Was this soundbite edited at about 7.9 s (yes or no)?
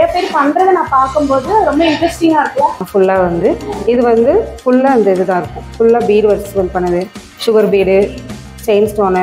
no